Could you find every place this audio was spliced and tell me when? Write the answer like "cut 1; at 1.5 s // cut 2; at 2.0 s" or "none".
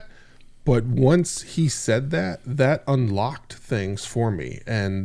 none